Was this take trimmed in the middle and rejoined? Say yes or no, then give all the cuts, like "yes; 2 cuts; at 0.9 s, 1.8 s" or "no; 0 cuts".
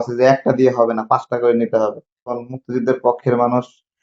yes; 1 cut; at 2.4 s